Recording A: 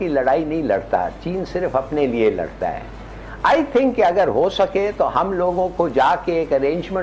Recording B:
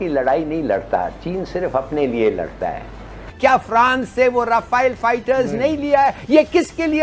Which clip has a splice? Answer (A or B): B